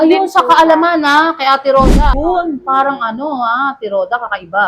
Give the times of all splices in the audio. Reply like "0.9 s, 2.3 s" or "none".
2.1 s

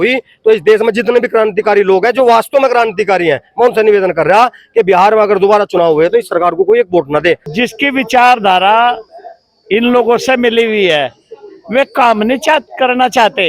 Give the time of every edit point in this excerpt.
7.5 s

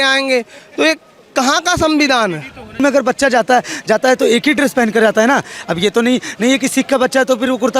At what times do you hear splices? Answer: 2.8 s

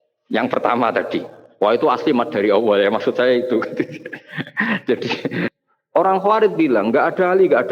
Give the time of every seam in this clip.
5.6 s

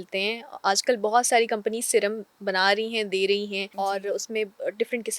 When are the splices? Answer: 3.6 s

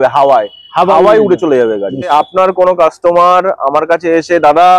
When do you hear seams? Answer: 2.1 s

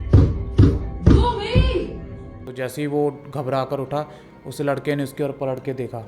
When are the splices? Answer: 2.5 s

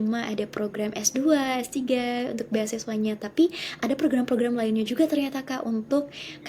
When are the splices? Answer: none

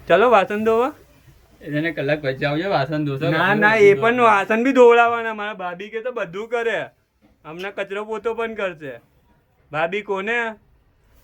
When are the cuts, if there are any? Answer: none

